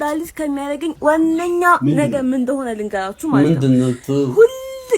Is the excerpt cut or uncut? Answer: cut